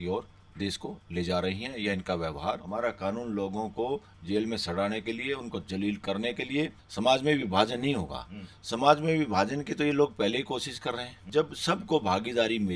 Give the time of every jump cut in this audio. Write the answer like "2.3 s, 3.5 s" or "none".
2.6 s, 6.8 s, 11.1 s